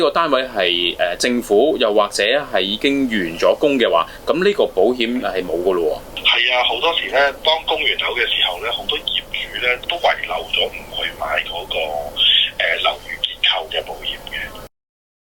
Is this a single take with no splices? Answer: yes; 0 cuts

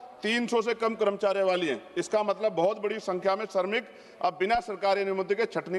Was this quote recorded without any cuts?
yes; 0 cuts

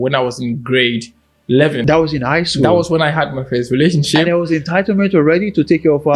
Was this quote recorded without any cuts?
no; 1 cut; at 1.8 s

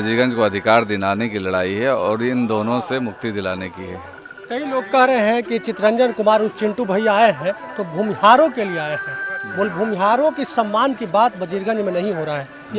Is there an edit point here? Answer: no; 0 cuts

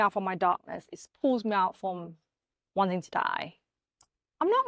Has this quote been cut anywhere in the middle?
yes; 1 cut; at 3.6 s

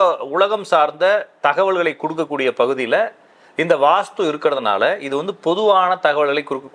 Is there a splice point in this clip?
no; 0 cuts

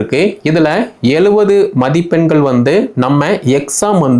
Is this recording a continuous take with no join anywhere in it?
yes; 0 cuts

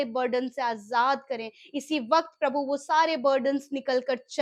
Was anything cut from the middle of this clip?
no; 0 cuts

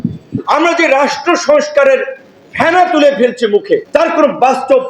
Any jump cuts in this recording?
yes; 1 cut; at 3.8 s

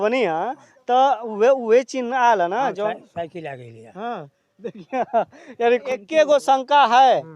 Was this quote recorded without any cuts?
no; 1 cut; at 5.7 s

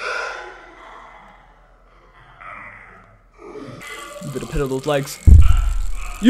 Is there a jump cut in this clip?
yes; 1 cut; at 3.8 s

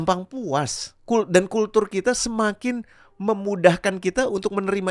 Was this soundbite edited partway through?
no; 0 cuts

